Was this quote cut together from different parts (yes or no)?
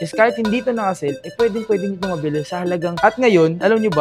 yes